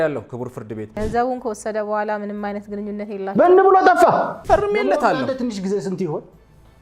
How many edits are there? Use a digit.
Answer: 2